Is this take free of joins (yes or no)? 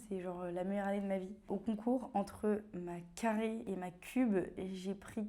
no